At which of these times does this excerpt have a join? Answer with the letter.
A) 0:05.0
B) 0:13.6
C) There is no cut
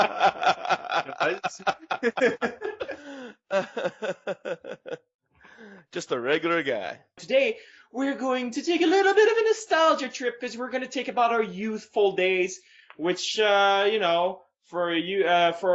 A